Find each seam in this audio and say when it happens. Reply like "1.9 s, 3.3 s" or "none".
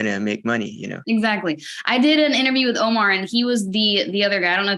none

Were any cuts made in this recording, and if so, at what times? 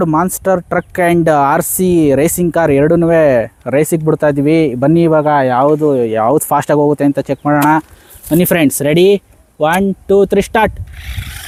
none

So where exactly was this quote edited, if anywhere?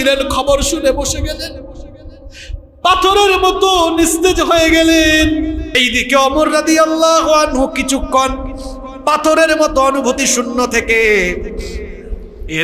5.7 s

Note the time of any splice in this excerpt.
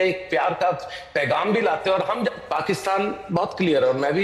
2.4 s

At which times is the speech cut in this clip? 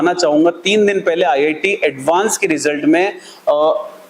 none

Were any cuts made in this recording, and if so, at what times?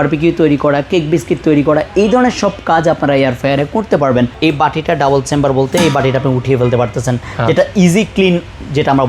4.3 s

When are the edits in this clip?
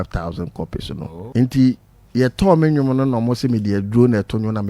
1.2 s

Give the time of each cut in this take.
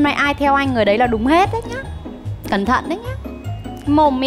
none

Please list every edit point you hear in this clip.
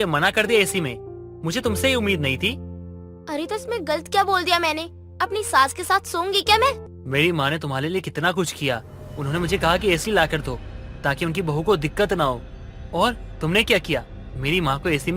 6.9 s

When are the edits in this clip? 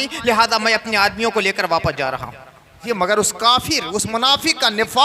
2.8 s

